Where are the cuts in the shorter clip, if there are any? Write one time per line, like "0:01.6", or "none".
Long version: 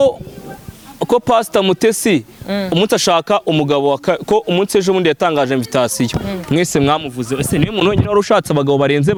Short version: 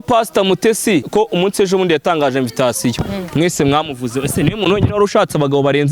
0:01.1